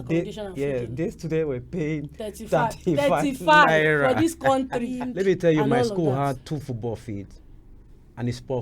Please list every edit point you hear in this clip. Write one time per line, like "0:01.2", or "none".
0:05.0